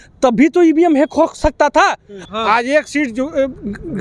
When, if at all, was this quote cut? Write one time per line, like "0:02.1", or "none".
0:02.2